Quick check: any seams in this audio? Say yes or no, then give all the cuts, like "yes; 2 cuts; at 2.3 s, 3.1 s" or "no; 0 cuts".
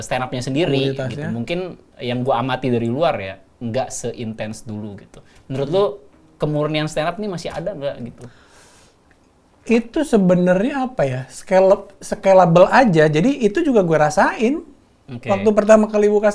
no; 0 cuts